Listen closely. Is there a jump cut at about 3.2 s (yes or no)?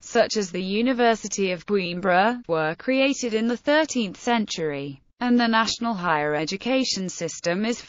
yes